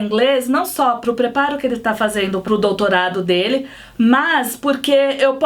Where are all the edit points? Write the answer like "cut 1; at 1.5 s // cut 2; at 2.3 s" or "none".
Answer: cut 1; at 1.0 s // cut 2; at 2.4 s